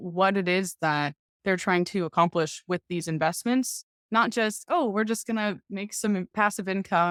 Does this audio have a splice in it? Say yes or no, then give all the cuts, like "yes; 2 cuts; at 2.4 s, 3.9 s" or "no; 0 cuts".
no; 0 cuts